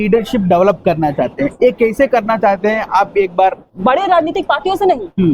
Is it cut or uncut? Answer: cut